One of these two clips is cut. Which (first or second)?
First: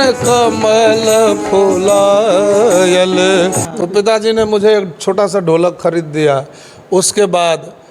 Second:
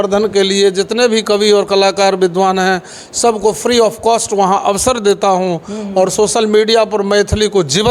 first